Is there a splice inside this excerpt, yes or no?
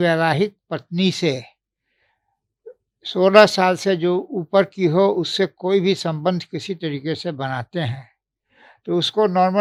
no